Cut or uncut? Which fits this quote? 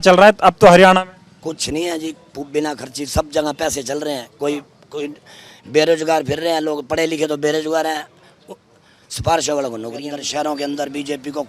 cut